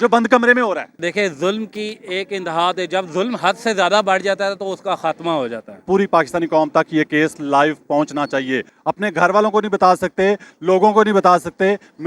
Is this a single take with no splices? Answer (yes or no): no